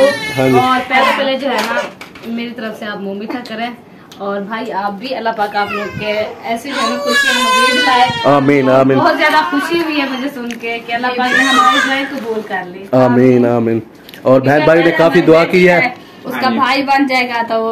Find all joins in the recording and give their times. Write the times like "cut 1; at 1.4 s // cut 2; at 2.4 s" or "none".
none

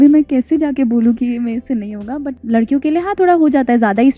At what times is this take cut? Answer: cut 1; at 2.4 s

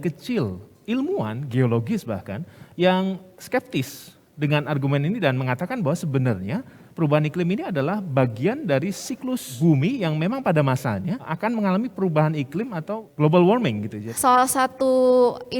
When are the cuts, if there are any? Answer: cut 1; at 9.5 s // cut 2; at 11.3 s // cut 3; at 11.9 s // cut 4; at 13.0 s // cut 5; at 14.1 s

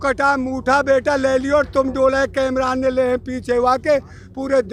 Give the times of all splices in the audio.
none

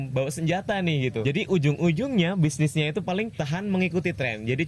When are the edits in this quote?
cut 1; at 1.2 s // cut 2; at 3.4 s

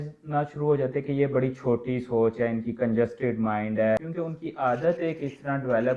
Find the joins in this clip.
cut 1; at 4.0 s

